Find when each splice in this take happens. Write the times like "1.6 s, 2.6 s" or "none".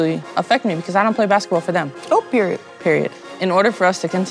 3.3 s